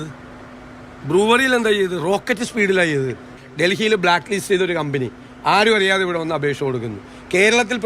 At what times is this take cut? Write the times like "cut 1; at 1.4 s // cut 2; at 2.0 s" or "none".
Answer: cut 1; at 3.3 s